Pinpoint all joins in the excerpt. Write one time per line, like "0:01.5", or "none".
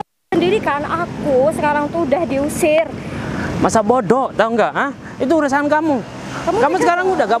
none